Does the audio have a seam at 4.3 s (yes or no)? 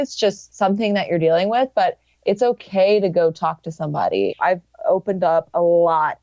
yes